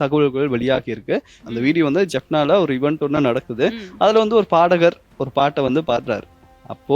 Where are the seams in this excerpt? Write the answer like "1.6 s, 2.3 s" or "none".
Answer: 1.3 s

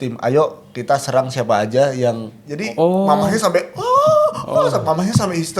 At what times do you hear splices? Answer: 2.6 s

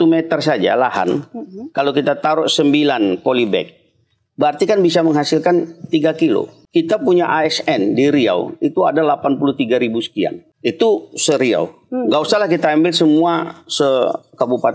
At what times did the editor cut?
6.6 s, 10.5 s

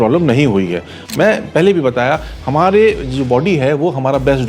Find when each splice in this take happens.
1.0 s

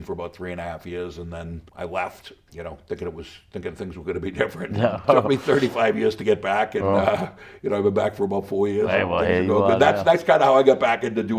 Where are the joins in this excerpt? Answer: 5.0 s

